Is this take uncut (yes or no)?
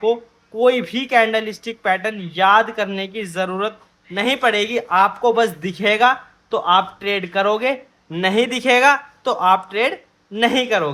yes